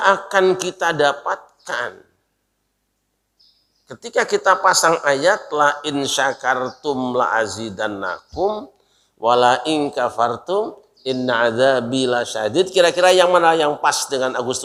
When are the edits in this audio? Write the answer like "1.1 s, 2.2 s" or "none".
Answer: none